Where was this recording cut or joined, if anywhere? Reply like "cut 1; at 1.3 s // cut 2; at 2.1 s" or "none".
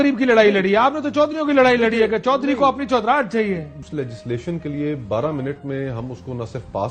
cut 1; at 3.8 s

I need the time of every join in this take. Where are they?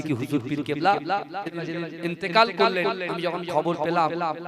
cut 1; at 1.7 s

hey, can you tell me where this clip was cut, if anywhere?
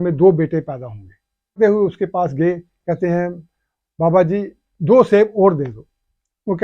cut 1; at 1.6 s

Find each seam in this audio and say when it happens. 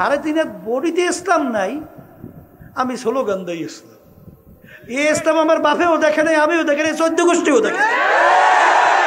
none

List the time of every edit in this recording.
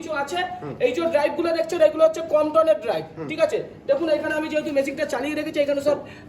none

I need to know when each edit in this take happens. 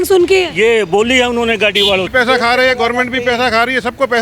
cut 1; at 2.1 s

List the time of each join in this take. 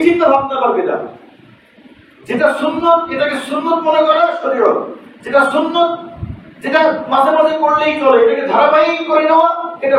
none

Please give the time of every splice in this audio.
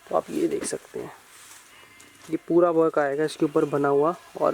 none

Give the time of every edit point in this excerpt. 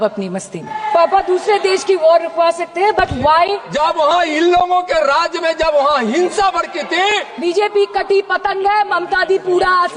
cut 1; at 0.8 s // cut 2; at 3.6 s // cut 3; at 7.3 s

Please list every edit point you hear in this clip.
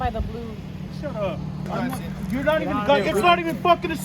cut 1; at 1.7 s

